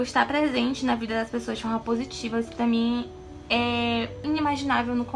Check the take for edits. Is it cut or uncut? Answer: cut